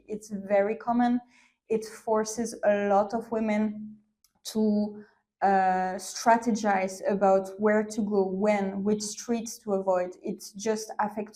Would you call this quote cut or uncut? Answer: uncut